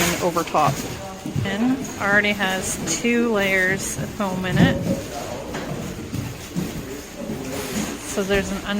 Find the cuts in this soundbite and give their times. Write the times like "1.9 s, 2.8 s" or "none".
1.5 s